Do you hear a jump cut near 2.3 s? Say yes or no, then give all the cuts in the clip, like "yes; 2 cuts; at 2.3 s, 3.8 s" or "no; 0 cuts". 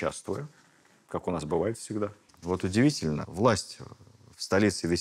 yes; 1 cut; at 2.3 s